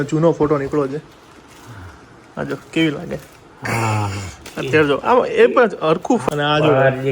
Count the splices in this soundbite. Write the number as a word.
one